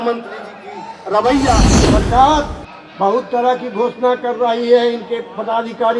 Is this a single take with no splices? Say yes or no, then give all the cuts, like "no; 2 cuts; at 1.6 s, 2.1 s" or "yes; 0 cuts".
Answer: no; 1 cut; at 1.6 s